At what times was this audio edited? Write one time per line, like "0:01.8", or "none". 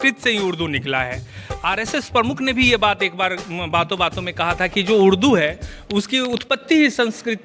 none